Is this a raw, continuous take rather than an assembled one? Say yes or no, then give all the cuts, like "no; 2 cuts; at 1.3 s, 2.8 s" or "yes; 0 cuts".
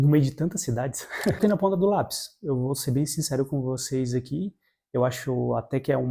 no; 1 cut; at 1.4 s